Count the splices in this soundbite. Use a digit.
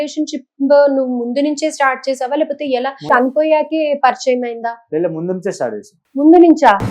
2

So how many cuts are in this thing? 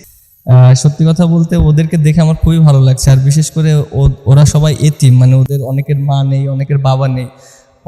0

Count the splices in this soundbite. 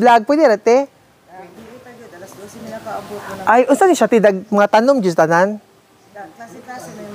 1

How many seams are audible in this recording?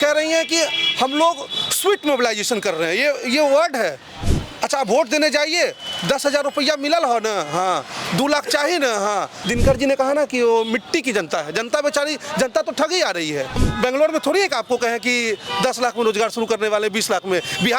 3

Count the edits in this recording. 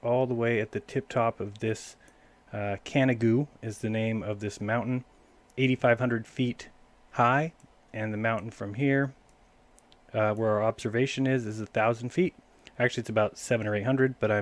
0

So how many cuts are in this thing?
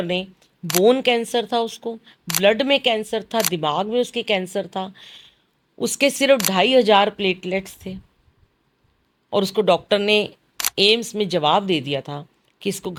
0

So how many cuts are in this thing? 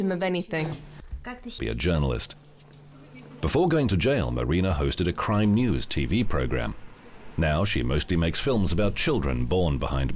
0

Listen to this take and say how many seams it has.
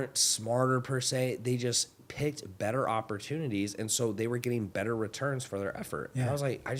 0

